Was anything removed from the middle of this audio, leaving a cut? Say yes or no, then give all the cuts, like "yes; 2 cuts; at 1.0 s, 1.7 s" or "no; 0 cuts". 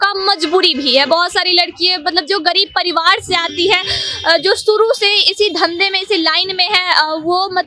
no; 0 cuts